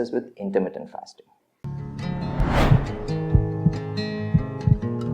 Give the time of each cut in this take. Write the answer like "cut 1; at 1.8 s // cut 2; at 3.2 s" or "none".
cut 1; at 1.5 s

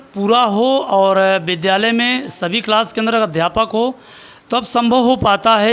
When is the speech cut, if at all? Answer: none

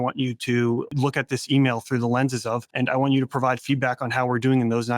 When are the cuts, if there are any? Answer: cut 1; at 0.9 s // cut 2; at 2.7 s

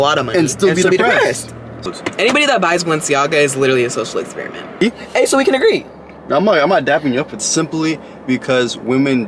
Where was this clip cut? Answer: cut 1; at 1.9 s // cut 2; at 4.8 s // cut 3; at 7.5 s

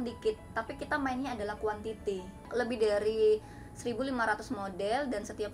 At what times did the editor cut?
cut 1; at 2.5 s

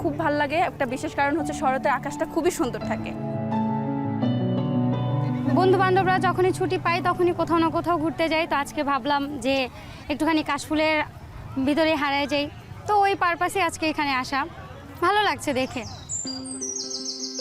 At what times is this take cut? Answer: none

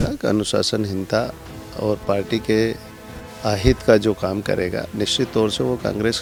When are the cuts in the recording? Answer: none

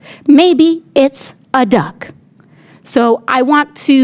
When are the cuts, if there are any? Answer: none

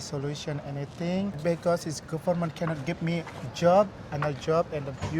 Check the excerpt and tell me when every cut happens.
cut 1; at 1.4 s

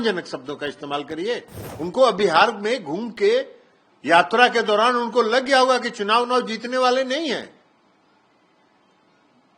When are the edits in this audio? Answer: cut 1; at 1.6 s

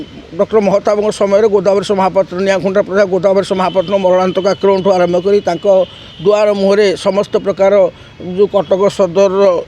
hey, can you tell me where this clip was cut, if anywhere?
none

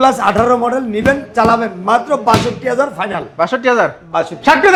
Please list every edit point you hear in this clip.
none

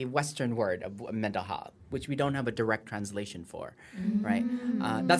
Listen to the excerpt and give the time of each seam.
none

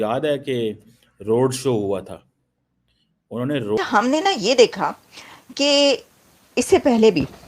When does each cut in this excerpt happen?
cut 1; at 3.8 s

